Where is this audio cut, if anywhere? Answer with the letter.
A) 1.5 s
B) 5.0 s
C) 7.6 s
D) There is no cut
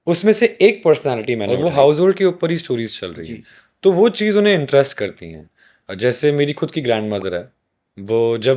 A